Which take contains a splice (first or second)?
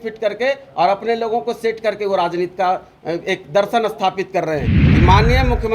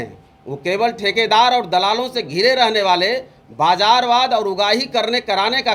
first